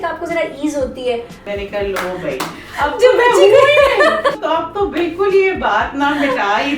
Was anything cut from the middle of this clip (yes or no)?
yes